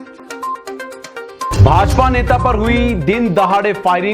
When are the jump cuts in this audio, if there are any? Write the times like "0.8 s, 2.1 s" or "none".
1.2 s